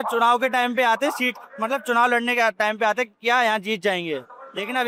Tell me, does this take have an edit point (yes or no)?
no